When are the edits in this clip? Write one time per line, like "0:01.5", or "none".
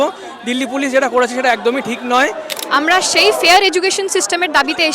0:02.6